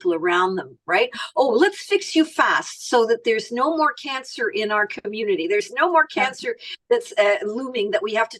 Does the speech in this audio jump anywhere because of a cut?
no; 0 cuts

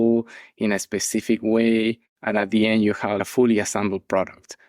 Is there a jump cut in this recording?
yes; 1 cut; at 2.1 s

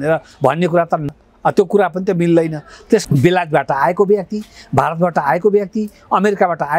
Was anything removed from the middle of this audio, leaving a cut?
yes; 2 cuts; at 1.1 s, 3.0 s

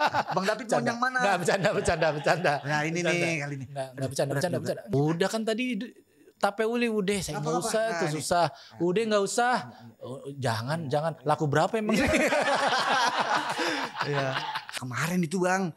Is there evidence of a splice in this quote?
yes; 2 cuts; at 4.9 s, 14.7 s

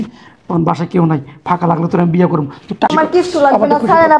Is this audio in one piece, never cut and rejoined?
no; 1 cut; at 2.9 s

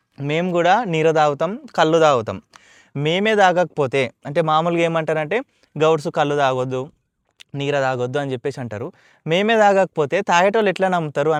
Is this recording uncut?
yes; 0 cuts

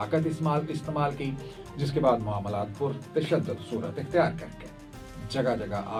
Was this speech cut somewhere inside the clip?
no; 0 cuts

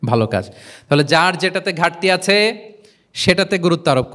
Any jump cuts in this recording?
no; 0 cuts

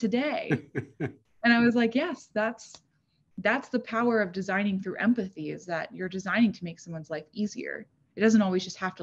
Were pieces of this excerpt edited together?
no; 0 cuts

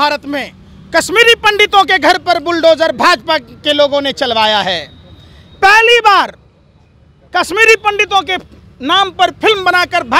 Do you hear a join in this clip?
no; 0 cuts

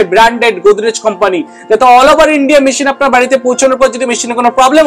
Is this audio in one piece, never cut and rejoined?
yes; 0 cuts

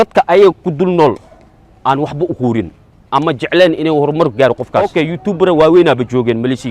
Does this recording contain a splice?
yes; 1 cut; at 4.9 s

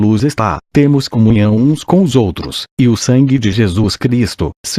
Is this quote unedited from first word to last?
no; 1 cut; at 2.5 s

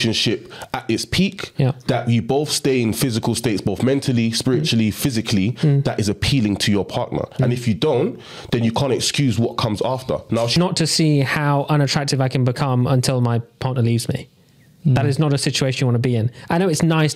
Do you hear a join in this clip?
yes; 1 cut; at 10.6 s

